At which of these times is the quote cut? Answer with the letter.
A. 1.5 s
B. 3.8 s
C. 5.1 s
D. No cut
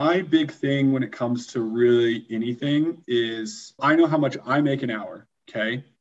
B